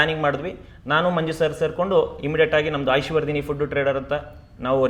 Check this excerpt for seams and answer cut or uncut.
uncut